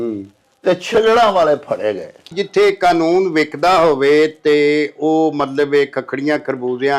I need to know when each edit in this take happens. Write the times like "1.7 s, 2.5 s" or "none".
2.3 s